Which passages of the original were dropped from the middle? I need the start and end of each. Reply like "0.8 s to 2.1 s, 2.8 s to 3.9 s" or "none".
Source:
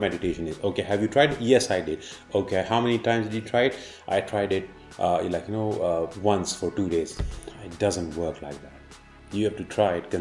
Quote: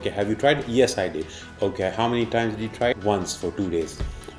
3.6 s to 6.1 s